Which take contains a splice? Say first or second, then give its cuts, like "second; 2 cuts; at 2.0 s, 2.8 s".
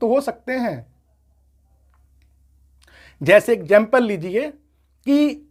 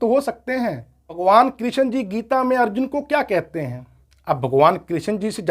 second; 1 cut; at 1.2 s